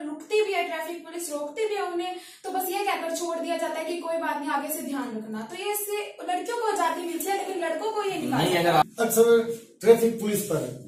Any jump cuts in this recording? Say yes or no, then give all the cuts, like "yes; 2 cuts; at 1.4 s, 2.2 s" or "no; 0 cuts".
yes; 1 cut; at 8.8 s